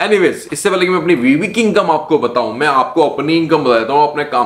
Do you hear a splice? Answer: no; 0 cuts

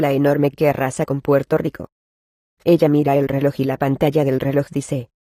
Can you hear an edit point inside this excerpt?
yes; 1 cut; at 3.3 s

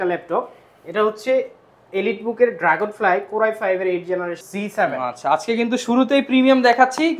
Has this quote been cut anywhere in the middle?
yes; 1 cut; at 4.4 s

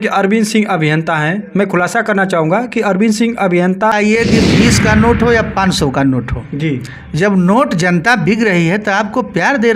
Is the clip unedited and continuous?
no; 1 cut; at 3.9 s

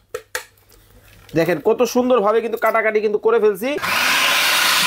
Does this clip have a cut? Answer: yes; 1 cut; at 3.9 s

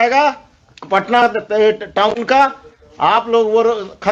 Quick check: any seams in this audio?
no; 0 cuts

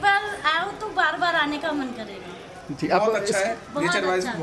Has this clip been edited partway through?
no; 0 cuts

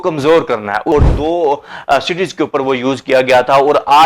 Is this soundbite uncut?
no; 1 cut; at 0.9 s

